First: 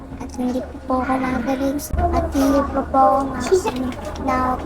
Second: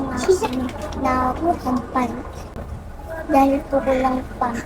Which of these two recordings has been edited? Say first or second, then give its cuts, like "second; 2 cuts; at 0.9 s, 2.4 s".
first; 1 cut; at 1.8 s